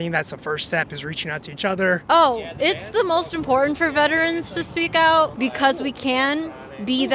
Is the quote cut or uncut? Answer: cut